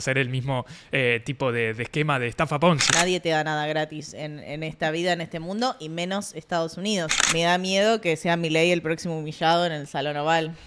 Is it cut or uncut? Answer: cut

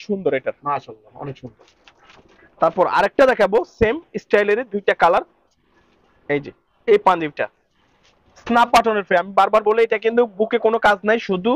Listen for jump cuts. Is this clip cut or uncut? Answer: uncut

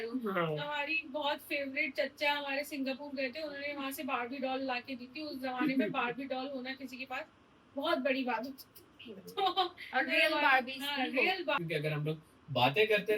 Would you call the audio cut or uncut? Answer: cut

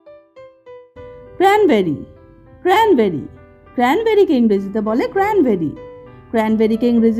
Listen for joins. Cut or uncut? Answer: cut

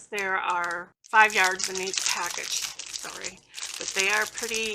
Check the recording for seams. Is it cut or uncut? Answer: cut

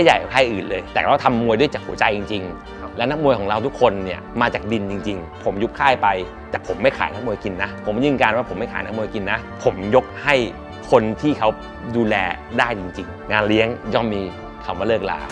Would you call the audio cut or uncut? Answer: cut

